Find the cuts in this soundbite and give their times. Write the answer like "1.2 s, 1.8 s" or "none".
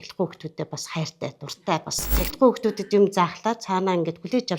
2.0 s